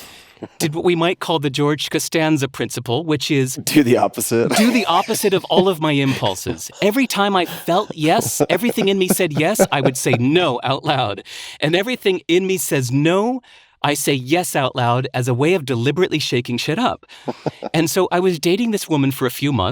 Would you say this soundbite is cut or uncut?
cut